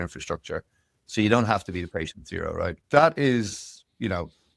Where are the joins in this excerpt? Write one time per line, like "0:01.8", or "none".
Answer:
0:02.8